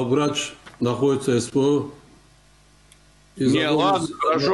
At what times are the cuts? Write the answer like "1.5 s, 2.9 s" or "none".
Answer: none